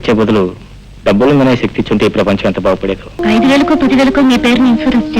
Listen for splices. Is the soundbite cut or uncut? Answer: cut